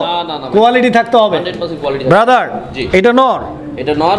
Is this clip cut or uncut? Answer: uncut